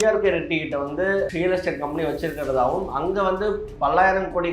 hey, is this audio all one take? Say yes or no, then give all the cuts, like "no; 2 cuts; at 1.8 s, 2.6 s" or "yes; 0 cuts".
no; 1 cut; at 1.3 s